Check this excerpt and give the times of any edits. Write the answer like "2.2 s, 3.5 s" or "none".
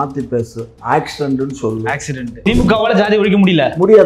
2.4 s